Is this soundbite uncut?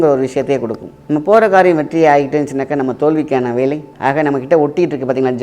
no; 2 cuts; at 0.9 s, 3.9 s

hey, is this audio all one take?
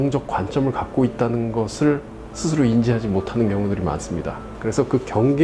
no; 1 cut; at 4.5 s

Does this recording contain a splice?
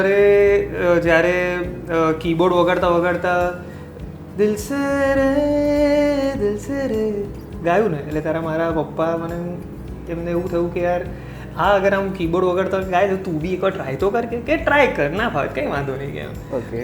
no; 0 cuts

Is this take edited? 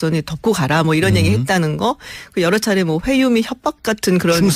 no; 0 cuts

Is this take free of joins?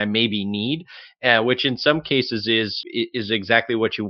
no; 1 cut; at 2.8 s

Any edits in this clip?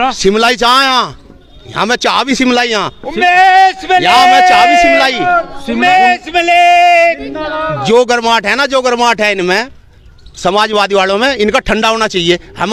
no; 0 cuts

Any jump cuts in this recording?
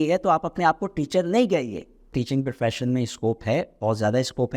yes; 1 cut; at 2.1 s

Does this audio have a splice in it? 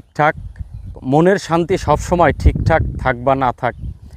yes; 1 cut; at 1.0 s

